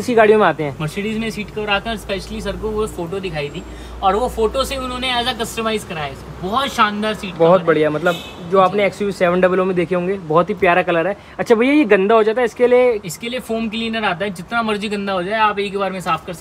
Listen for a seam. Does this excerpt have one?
no; 0 cuts

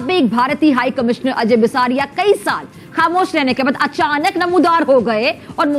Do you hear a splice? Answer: no; 0 cuts

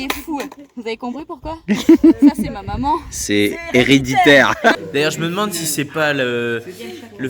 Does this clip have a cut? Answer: yes; 1 cut; at 4.8 s

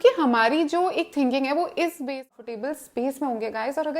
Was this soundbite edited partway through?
yes; 1 cut; at 2.3 s

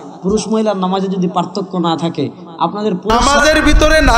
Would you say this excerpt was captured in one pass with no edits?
no; 1 cut; at 3.2 s

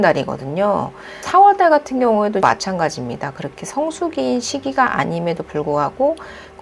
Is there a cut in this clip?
yes; 2 cuts; at 1.2 s, 2.4 s

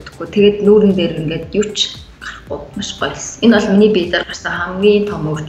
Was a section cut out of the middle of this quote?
no; 0 cuts

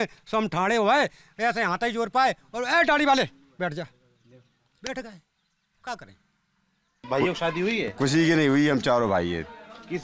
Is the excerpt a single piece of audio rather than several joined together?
no; 1 cut; at 7.0 s

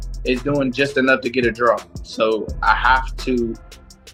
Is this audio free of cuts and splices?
yes; 0 cuts

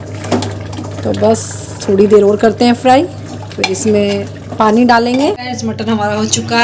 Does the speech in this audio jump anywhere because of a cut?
yes; 1 cut; at 5.5 s

